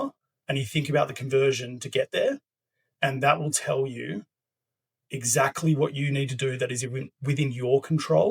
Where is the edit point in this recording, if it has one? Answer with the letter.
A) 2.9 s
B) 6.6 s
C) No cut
C